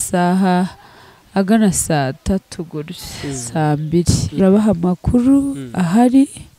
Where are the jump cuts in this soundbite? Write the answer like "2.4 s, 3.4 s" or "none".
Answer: 4.4 s